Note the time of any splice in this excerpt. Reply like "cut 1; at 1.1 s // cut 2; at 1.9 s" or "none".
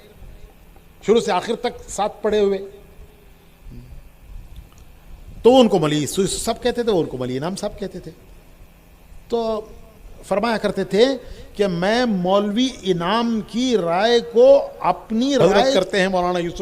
cut 1; at 15.4 s

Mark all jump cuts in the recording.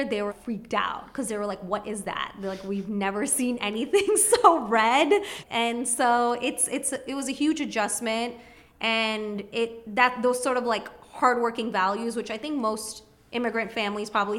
cut 1; at 5.3 s

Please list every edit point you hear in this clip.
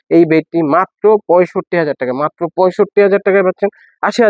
none

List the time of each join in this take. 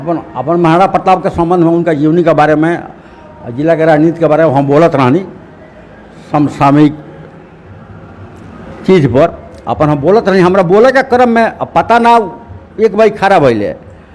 none

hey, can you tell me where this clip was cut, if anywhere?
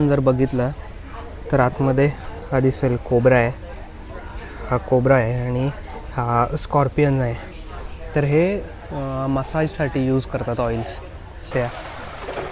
cut 1; at 11.5 s

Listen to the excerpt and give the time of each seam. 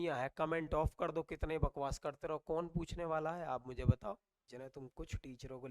cut 1; at 4.4 s

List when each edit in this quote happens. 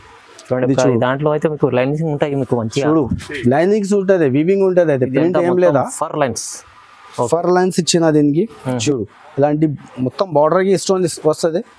cut 1; at 8.7 s

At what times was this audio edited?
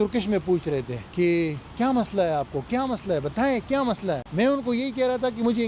cut 1; at 1.0 s // cut 2; at 4.3 s

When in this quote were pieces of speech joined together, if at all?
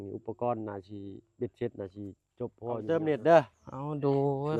cut 1; at 2.8 s

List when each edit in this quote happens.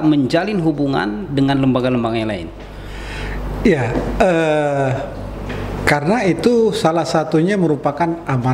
none

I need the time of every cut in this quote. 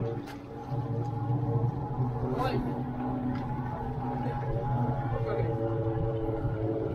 none

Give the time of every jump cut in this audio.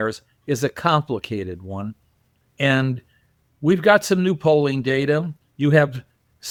none

